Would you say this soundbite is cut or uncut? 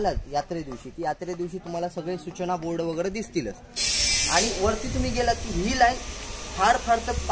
cut